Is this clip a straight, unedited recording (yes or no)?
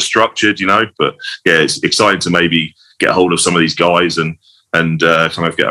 no